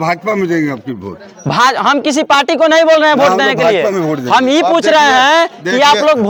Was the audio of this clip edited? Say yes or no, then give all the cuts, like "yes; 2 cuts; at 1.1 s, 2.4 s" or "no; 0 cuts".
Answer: no; 0 cuts